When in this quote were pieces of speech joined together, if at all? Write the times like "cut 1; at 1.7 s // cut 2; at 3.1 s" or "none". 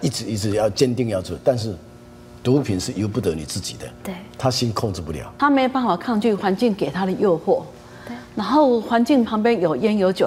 cut 1; at 5.3 s